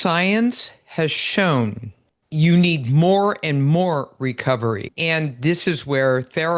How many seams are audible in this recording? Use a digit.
1